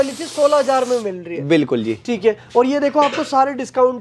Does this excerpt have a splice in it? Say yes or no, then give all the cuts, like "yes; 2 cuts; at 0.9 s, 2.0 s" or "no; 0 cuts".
no; 0 cuts